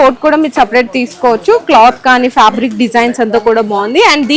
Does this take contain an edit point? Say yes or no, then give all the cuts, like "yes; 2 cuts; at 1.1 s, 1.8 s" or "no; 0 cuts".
no; 0 cuts